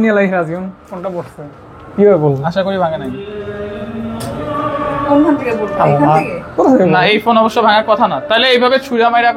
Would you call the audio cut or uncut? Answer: uncut